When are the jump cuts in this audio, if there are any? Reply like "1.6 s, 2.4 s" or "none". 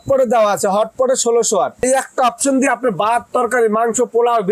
1.8 s